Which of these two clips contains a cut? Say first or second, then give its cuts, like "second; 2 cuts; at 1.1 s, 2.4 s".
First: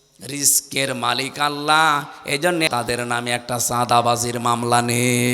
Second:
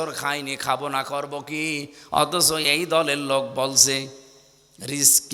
first; 1 cut; at 2.7 s